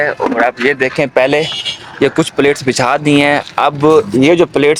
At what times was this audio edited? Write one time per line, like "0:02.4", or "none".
none